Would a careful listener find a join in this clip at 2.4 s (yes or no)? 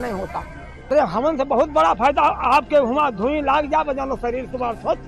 no